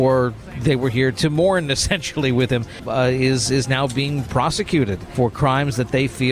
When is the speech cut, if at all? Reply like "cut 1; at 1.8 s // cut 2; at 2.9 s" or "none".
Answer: cut 1; at 1.2 s // cut 2; at 2.8 s // cut 3; at 5.1 s